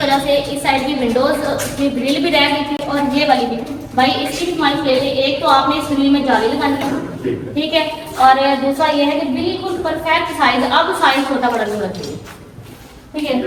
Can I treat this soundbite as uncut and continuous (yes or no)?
yes